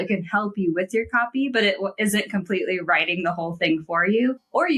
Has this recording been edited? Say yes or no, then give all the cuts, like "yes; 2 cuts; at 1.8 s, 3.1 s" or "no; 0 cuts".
no; 0 cuts